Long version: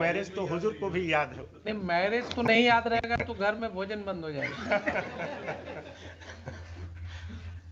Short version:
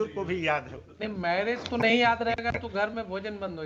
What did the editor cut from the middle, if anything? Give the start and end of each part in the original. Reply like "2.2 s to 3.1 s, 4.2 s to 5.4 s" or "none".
none